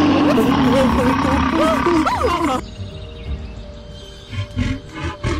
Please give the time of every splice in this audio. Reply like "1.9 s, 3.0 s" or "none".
none